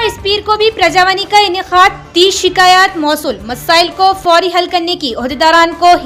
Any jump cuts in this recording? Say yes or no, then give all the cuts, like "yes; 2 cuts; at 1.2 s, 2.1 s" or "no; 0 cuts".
no; 0 cuts